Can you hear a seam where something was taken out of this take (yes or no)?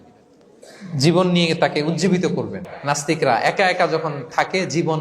yes